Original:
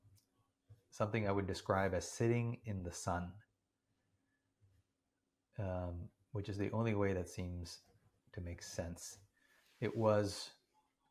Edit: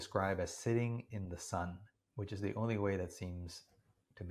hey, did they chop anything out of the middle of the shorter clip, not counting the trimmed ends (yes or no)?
yes